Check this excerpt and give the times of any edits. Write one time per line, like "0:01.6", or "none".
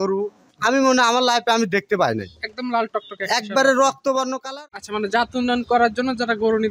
0:04.4